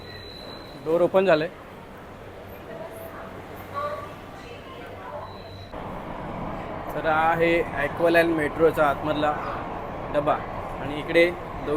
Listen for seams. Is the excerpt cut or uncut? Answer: uncut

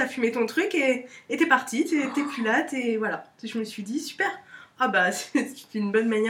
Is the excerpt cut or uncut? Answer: uncut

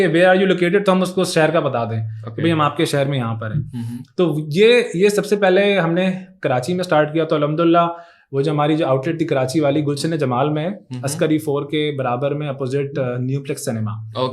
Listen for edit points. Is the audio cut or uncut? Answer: uncut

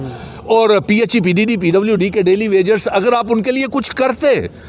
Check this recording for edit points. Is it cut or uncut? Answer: uncut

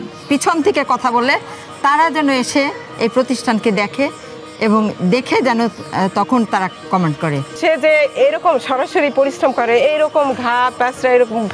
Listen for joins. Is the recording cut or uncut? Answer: cut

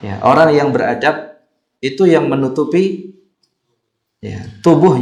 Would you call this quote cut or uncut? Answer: uncut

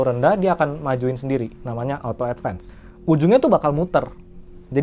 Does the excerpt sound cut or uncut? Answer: cut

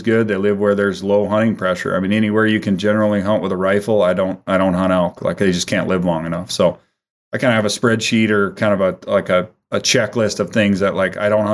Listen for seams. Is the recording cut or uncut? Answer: uncut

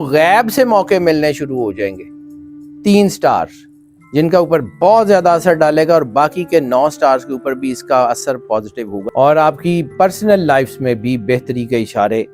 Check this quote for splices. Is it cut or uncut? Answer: cut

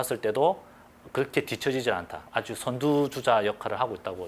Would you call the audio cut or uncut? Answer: cut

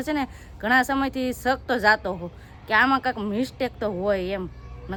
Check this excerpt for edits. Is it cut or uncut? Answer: uncut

